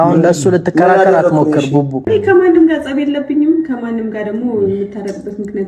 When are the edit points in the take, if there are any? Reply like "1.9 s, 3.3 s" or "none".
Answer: 2.1 s